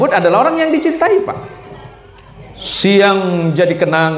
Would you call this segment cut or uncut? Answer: uncut